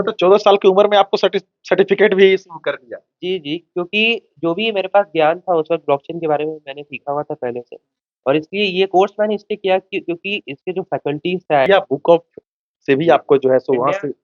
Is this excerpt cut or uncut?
cut